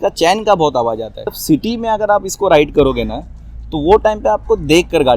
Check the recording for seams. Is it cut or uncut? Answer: cut